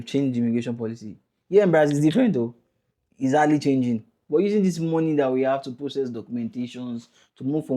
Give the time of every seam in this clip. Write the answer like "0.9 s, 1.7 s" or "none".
4.1 s